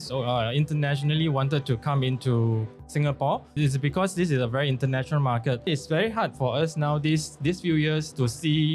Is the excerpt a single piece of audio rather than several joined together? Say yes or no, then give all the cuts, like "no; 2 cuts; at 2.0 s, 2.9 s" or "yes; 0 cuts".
no; 3 cuts; at 3.5 s, 5.7 s, 7.4 s